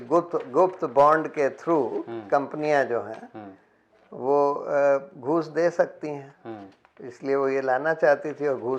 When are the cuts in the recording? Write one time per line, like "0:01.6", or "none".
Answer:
none